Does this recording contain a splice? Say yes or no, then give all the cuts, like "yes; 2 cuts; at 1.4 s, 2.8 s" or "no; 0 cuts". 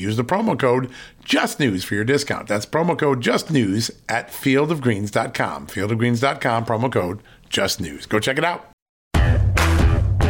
yes; 1 cut; at 9.1 s